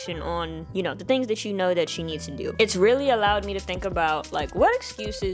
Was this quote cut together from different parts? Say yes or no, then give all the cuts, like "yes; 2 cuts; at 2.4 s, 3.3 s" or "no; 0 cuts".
yes; 1 cut; at 2.5 s